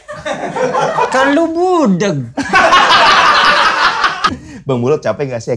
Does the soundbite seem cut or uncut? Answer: cut